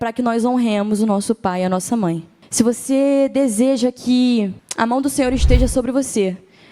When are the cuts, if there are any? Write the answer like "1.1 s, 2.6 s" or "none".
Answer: 2.4 s, 4.6 s